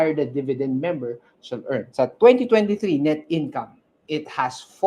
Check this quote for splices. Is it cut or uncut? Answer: cut